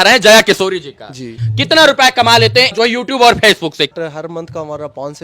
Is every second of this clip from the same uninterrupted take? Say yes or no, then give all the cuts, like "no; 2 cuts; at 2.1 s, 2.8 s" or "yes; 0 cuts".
no; 3 cuts; at 1.4 s, 2.7 s, 3.9 s